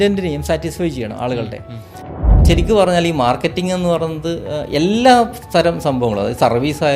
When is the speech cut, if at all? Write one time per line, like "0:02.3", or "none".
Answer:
0:02.2